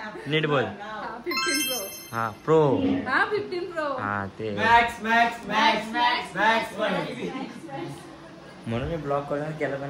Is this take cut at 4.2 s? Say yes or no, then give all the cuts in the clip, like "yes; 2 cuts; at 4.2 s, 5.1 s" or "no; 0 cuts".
no; 0 cuts